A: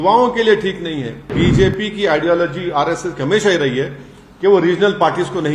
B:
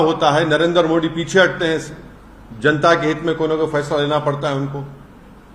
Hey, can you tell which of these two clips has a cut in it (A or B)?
A